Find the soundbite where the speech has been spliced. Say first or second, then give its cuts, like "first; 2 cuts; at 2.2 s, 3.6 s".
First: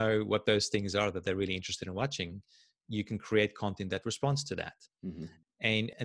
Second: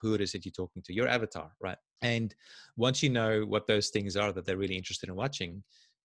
second; 1 cut; at 1.9 s